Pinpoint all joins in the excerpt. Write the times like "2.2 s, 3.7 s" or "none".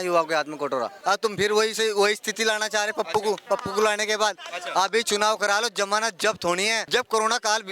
0.9 s, 6.8 s